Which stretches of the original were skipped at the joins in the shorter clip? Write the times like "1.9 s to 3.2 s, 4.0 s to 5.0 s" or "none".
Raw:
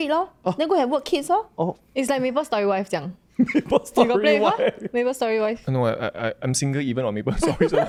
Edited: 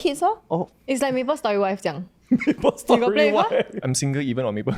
4.8 s to 6.4 s